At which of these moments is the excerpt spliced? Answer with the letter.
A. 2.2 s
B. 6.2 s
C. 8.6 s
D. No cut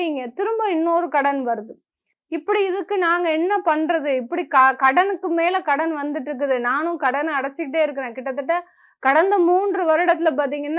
D